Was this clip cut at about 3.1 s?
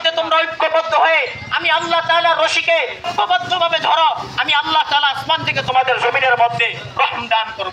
yes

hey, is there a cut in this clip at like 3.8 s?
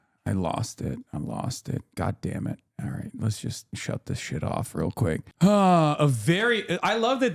yes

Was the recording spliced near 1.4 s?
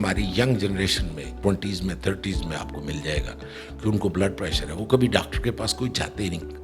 yes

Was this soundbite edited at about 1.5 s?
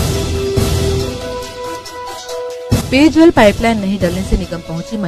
no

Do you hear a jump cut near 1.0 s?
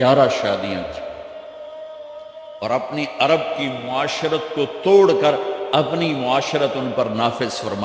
yes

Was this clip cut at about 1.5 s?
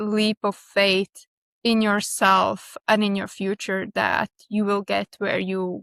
no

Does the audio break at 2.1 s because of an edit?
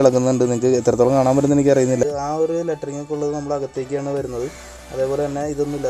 yes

